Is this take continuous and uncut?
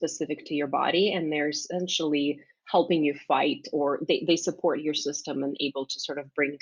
yes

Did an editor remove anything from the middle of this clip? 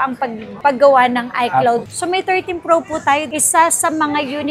yes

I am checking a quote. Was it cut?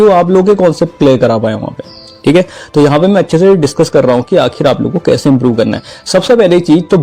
no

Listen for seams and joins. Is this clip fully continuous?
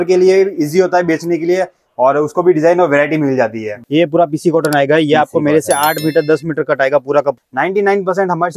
no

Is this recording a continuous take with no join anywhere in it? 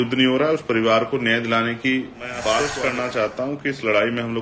no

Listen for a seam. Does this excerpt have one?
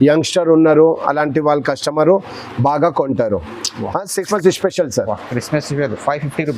yes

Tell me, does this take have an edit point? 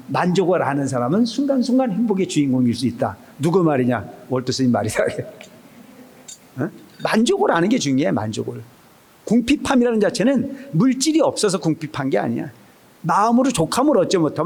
no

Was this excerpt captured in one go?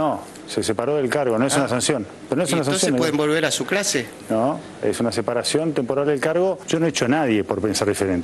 yes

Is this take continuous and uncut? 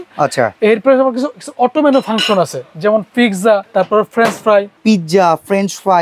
no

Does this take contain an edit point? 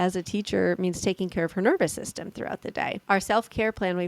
yes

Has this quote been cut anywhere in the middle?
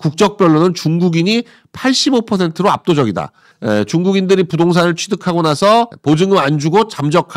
yes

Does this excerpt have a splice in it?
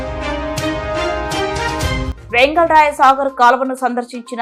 no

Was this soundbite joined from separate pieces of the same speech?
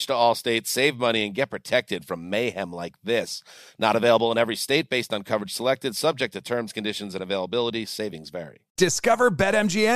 yes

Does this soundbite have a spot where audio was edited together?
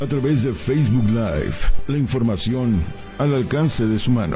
no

